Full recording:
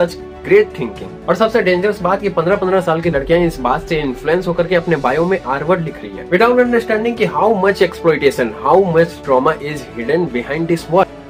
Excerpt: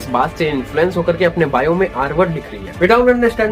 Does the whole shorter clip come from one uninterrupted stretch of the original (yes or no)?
yes